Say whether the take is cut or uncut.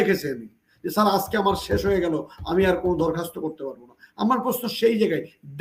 uncut